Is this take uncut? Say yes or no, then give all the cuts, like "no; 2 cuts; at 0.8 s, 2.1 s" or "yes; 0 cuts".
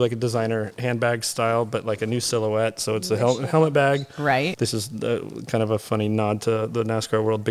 no; 1 cut; at 4.5 s